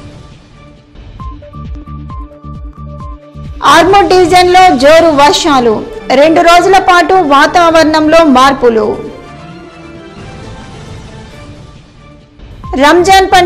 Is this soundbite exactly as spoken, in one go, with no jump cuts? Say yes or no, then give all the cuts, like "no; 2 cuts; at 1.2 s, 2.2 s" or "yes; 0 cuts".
no; 1 cut; at 1.0 s